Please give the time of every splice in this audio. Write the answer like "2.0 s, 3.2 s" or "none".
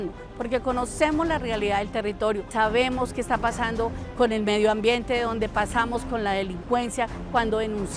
2.5 s